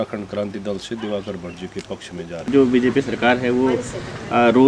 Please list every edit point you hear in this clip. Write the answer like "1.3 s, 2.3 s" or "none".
2.5 s